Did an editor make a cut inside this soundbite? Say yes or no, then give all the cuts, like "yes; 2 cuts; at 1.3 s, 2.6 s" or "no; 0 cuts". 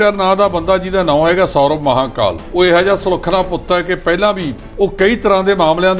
yes; 2 cuts; at 2.4 s, 4.6 s